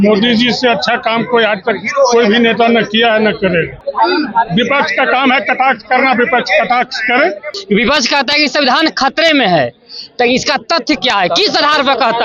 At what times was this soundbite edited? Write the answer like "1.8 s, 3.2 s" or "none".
3.8 s, 7.5 s